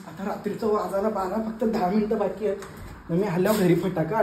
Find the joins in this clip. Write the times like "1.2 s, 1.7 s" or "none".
none